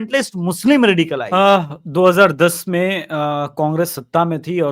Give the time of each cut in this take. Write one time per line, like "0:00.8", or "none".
0:01.2